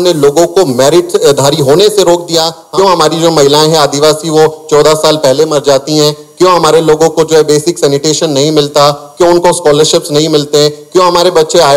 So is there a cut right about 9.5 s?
no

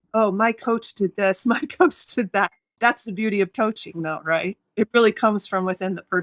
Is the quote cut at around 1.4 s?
no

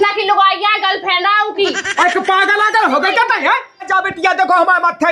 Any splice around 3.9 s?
yes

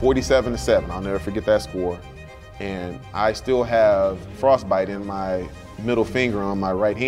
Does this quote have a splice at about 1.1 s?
no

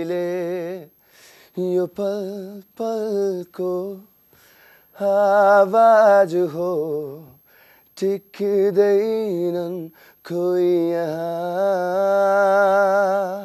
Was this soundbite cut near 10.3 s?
no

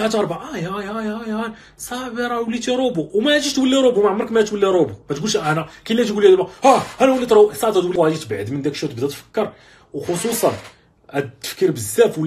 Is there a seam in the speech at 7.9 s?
yes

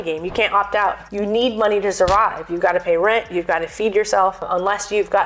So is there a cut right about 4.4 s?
yes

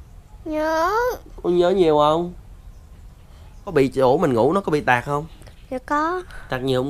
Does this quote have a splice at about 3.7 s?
yes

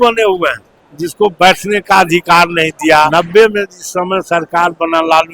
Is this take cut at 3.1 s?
yes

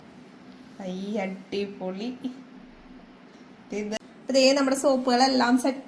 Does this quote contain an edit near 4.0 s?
yes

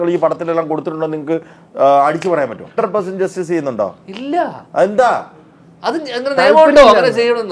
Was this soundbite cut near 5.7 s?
no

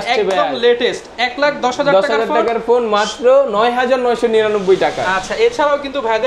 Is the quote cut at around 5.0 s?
no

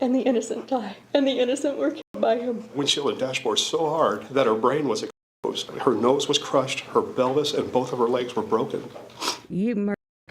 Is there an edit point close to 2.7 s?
yes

